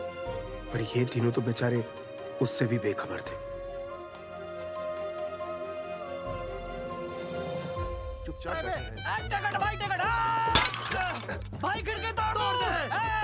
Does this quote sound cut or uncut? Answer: cut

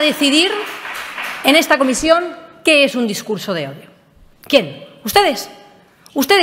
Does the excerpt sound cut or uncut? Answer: uncut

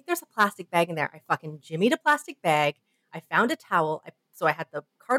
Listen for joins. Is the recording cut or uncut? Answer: uncut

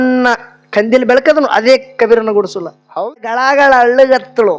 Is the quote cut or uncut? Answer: cut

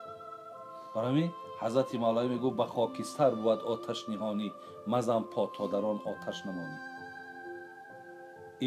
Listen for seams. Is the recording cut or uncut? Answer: cut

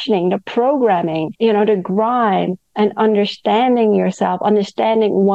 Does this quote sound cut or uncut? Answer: cut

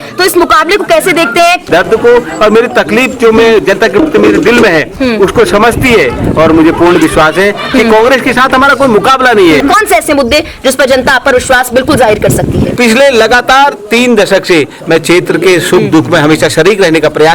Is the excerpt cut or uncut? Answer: cut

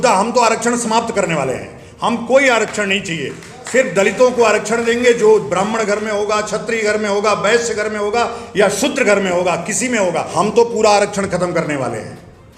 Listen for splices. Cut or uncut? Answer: cut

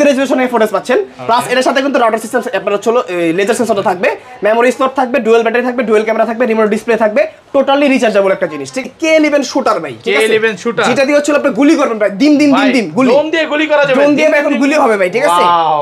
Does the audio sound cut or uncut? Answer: cut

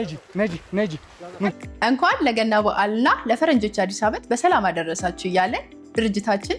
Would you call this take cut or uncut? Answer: cut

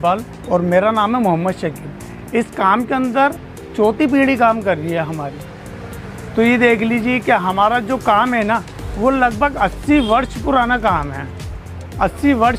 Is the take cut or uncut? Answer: uncut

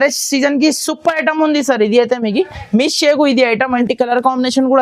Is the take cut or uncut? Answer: cut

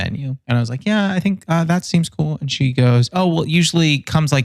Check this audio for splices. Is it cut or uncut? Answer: uncut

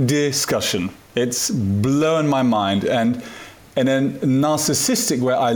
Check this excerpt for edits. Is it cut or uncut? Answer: uncut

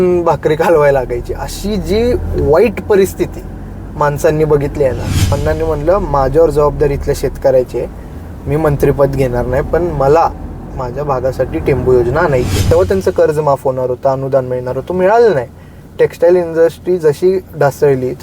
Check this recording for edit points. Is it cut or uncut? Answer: cut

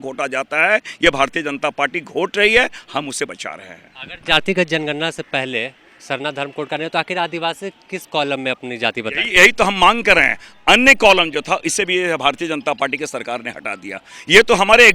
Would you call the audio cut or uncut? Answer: uncut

